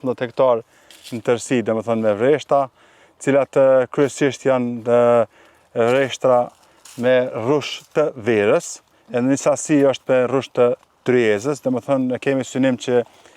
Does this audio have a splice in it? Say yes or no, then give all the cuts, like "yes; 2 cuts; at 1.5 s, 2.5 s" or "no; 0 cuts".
no; 0 cuts